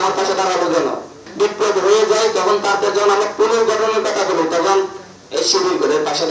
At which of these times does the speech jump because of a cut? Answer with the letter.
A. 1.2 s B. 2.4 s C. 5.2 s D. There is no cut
A